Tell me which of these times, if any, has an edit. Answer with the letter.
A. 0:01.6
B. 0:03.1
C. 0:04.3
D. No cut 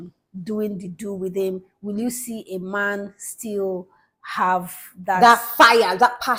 D